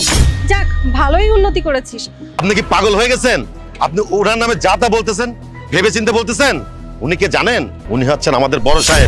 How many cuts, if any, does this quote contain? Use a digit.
2